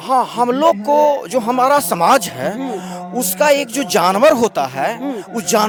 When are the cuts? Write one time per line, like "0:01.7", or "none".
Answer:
none